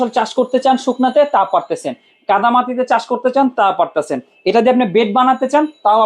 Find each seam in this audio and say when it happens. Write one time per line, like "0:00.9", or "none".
none